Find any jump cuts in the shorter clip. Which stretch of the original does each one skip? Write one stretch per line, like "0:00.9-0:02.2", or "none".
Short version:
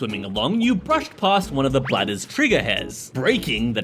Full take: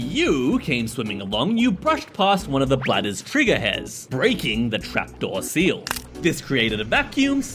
none